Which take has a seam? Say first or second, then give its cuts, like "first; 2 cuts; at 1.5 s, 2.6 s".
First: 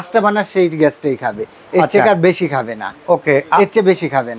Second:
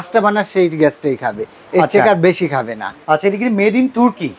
second; 1 cut; at 3.0 s